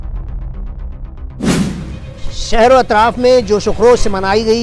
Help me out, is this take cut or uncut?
uncut